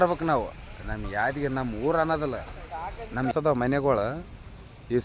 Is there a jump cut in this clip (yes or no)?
yes